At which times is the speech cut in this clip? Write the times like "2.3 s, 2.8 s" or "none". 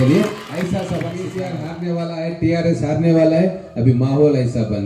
1.2 s